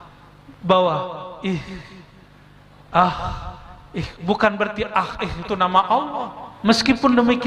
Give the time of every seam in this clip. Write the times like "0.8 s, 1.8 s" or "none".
6.4 s